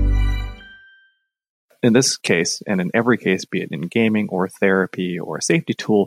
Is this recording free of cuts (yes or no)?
no